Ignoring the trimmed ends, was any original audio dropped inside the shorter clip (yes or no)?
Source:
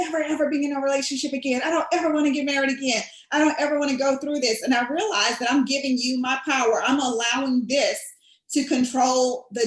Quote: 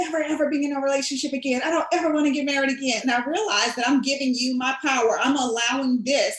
yes